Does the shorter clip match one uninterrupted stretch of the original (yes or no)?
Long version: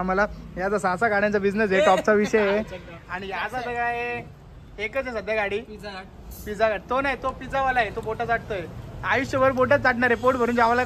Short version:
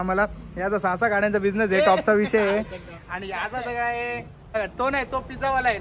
no